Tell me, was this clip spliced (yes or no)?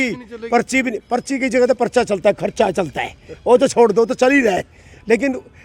no